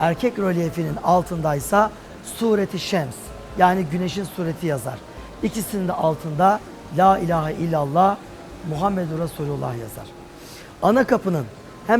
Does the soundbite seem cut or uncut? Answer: uncut